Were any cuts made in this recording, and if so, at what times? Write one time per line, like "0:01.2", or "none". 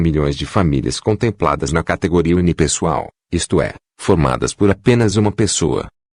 none